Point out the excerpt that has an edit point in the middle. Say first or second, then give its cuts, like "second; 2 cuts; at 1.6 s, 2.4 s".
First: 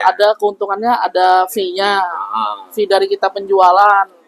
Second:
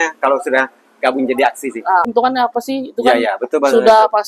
second; 1 cut; at 2.1 s